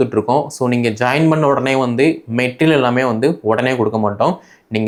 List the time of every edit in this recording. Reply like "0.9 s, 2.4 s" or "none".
none